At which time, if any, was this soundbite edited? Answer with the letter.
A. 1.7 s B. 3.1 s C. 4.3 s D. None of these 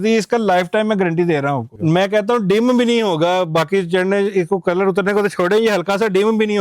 A